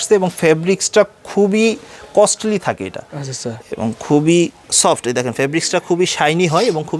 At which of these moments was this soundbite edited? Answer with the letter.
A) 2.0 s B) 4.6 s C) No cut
B